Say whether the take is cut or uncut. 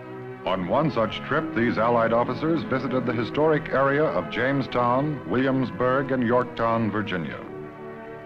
cut